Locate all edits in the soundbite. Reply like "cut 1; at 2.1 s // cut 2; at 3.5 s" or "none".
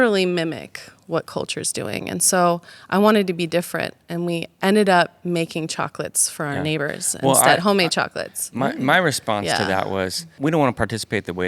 cut 1; at 10.4 s